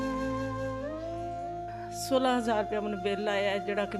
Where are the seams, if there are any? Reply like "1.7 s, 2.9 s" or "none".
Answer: 1.6 s

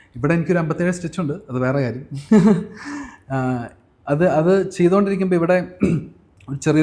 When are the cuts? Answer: none

